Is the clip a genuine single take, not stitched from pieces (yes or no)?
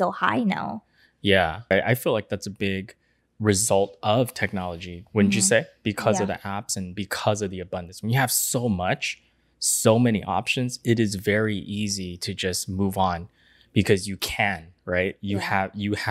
no